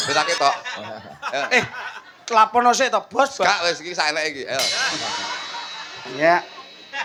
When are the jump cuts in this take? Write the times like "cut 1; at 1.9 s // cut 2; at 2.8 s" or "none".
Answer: none